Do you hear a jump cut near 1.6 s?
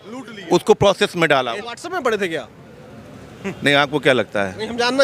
yes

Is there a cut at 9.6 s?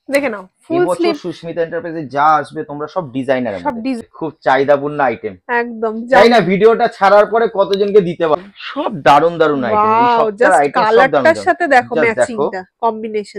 no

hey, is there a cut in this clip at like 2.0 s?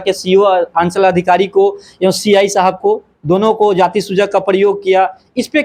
no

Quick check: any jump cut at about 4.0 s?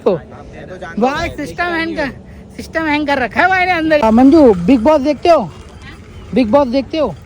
yes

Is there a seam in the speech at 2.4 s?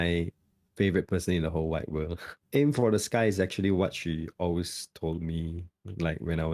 yes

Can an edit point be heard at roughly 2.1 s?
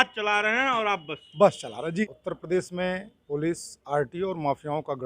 yes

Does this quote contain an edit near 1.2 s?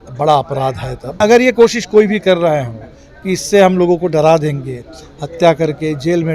yes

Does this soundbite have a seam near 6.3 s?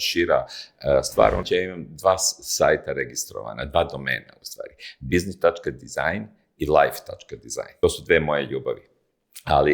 no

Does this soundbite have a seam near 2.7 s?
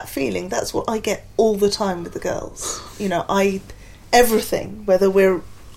no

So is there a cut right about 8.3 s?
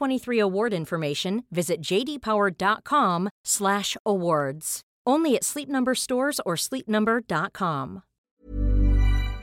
yes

